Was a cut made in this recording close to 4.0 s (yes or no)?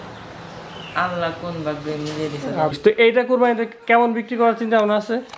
no